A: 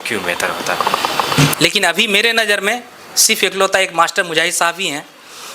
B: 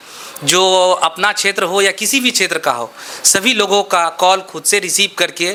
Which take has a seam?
A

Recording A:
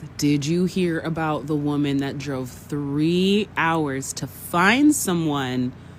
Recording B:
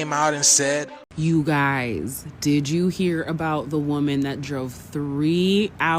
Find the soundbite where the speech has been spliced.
B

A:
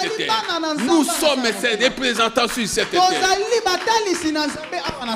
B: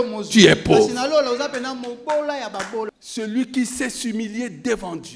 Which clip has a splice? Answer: B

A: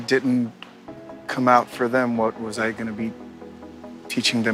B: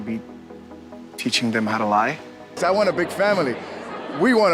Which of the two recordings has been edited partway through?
B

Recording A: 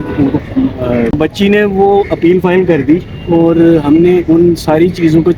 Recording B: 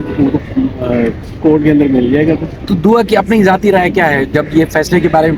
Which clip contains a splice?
A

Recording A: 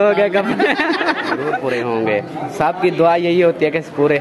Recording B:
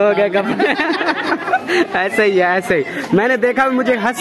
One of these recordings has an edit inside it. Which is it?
A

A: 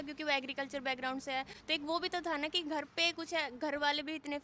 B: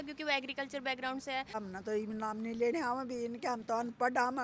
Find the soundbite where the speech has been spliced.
B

